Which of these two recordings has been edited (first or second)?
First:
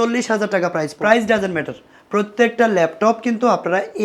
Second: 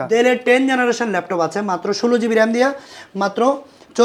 first